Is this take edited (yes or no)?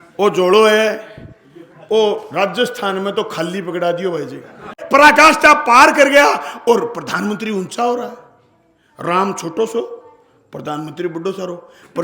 yes